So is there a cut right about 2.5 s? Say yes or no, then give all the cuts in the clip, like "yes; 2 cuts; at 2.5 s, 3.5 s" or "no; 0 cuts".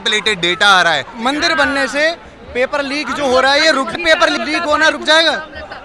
no; 2 cuts; at 1.1 s, 4.0 s